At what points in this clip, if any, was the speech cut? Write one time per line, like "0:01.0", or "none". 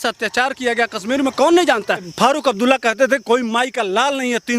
0:02.1